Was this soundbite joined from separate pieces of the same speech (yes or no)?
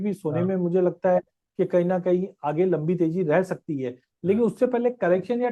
no